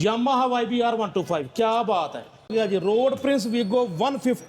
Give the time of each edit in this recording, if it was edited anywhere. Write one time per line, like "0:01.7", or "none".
0:02.5